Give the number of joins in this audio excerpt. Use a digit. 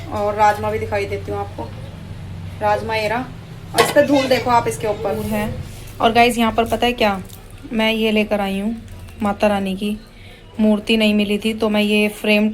1